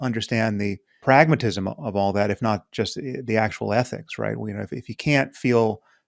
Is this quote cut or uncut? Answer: cut